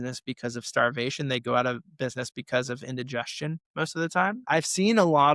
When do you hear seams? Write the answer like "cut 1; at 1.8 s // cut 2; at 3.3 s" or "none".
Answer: cut 1; at 4.4 s